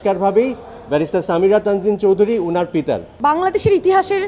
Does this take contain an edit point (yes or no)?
yes